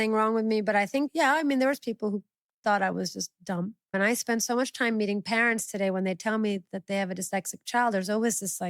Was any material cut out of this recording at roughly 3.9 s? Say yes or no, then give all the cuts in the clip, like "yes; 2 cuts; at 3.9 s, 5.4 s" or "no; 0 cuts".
yes; 2 cuts; at 1.1 s, 3.9 s